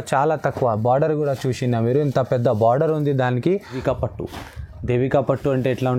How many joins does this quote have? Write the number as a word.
one